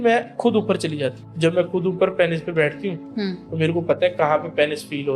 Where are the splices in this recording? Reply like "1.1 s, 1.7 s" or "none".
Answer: 1.2 s